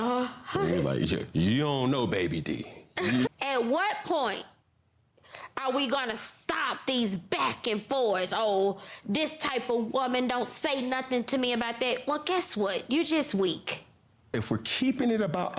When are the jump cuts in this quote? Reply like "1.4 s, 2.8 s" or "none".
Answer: 3.3 s, 14.3 s